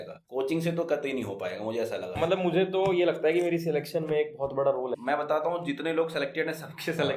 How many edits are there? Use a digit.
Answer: 2